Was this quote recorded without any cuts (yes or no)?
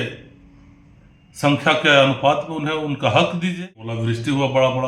no